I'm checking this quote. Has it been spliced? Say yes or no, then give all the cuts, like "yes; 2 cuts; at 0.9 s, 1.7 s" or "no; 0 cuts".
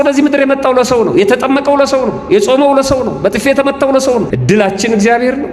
yes; 1 cut; at 4.3 s